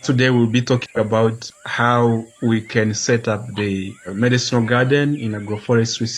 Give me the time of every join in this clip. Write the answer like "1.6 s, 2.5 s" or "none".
1.5 s, 2.3 s, 4.1 s